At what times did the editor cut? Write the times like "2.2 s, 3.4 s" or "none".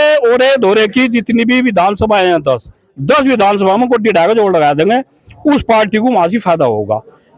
none